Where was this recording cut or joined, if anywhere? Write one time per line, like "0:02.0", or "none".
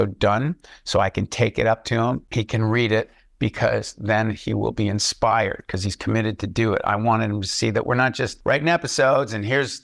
0:02.3
0:08.3